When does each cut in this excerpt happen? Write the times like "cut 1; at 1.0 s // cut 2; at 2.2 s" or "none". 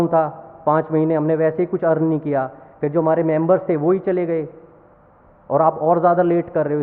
none